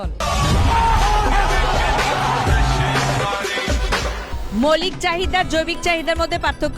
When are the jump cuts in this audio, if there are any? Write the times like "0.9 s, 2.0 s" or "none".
4.3 s